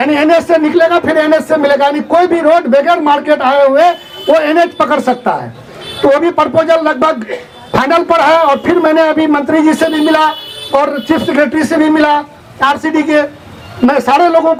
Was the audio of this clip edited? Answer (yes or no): no